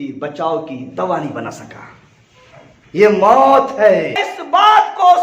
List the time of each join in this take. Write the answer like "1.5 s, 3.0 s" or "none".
4.3 s